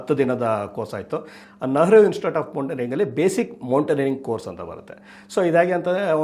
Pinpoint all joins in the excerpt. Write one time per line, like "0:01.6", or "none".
0:01.4